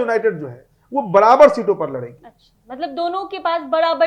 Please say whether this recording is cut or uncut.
uncut